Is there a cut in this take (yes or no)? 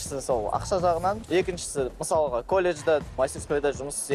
yes